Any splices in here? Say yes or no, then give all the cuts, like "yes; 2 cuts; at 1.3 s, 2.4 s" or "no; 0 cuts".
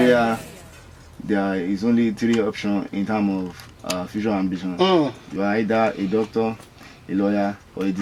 no; 0 cuts